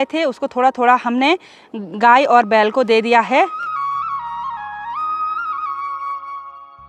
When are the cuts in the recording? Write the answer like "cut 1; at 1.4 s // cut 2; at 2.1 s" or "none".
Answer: none